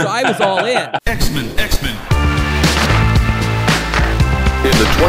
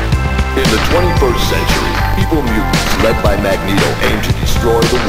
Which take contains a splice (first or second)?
first